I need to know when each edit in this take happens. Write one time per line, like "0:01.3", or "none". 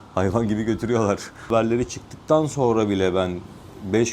0:01.5